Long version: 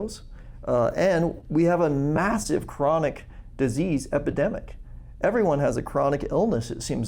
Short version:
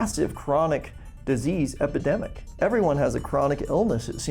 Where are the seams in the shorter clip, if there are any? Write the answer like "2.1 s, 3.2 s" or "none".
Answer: 2.4 s